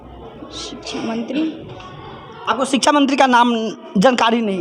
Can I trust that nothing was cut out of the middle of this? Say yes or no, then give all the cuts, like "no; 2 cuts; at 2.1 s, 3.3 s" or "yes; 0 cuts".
yes; 0 cuts